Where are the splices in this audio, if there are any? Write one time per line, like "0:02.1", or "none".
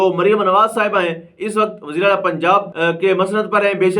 0:02.7